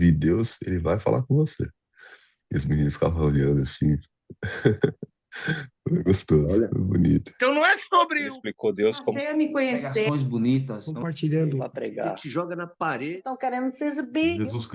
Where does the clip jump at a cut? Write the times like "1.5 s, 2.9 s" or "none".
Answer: 7.3 s